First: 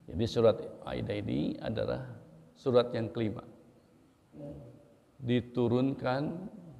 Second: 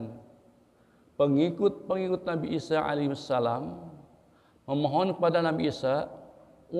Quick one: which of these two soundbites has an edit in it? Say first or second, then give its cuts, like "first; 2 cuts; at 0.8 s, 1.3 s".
first; 1 cut; at 4.4 s